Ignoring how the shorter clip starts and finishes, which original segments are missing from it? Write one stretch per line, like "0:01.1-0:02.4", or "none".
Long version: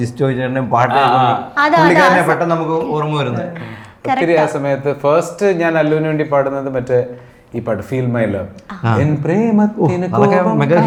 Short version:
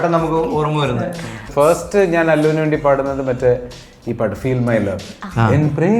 0:03.9-0:05.0